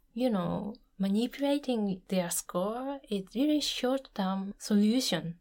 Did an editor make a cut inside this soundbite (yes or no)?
yes